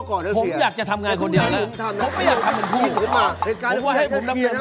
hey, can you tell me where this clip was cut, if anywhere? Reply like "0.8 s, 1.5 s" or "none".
3.4 s